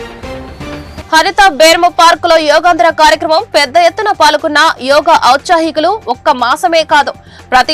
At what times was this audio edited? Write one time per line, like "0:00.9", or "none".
none